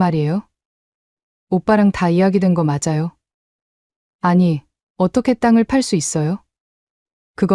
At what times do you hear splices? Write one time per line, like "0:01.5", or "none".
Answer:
none